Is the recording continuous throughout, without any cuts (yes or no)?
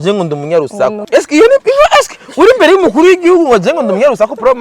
no